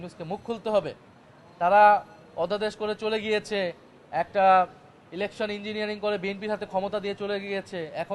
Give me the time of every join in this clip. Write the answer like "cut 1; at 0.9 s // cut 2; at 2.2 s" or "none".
none